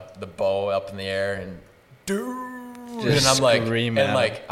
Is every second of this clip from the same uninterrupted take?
yes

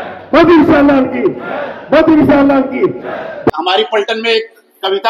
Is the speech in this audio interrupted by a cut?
yes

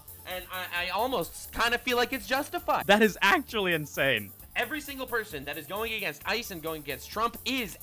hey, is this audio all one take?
no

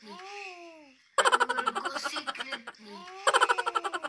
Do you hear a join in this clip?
yes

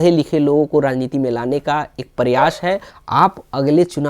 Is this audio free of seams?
no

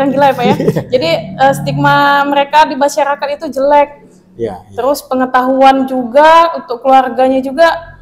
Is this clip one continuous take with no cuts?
yes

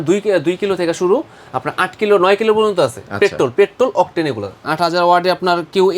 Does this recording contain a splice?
yes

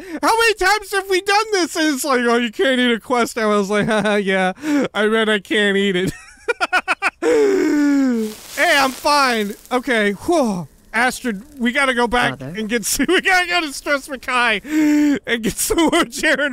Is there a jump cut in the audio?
yes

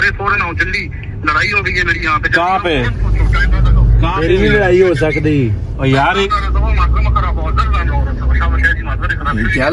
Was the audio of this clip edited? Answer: no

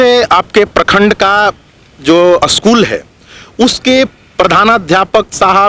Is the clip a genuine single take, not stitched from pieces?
yes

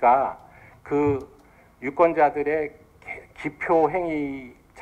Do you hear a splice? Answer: yes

